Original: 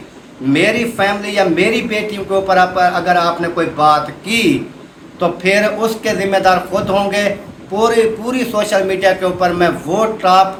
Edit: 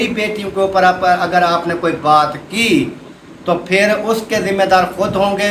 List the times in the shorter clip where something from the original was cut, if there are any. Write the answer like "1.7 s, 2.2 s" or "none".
none